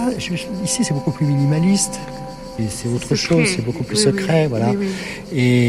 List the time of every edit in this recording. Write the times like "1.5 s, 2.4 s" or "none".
2.5 s